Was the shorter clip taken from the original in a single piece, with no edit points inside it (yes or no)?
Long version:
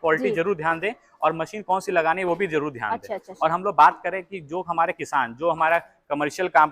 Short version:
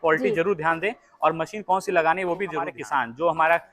no